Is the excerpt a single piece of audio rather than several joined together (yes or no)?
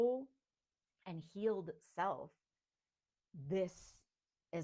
yes